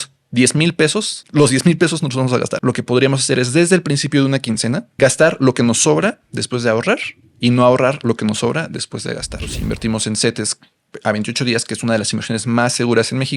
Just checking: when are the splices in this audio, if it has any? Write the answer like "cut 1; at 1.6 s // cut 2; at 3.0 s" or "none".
cut 1; at 2.5 s // cut 2; at 4.9 s // cut 3; at 9.5 s